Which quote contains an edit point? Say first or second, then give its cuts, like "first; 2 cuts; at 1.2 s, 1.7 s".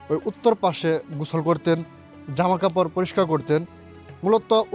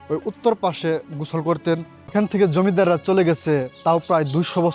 second; 1 cut; at 2.0 s